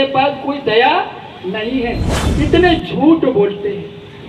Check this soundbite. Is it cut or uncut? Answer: cut